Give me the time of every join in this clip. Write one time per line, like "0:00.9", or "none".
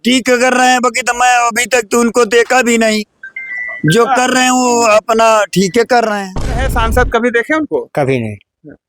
0:06.7